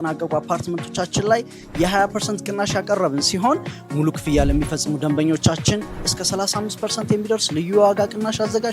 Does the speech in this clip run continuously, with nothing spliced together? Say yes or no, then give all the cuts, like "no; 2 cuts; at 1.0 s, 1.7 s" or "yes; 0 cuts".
yes; 0 cuts